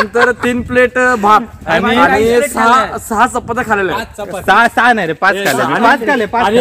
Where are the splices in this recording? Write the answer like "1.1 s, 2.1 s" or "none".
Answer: none